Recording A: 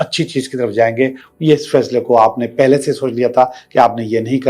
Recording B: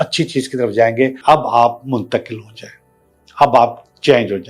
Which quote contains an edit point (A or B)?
B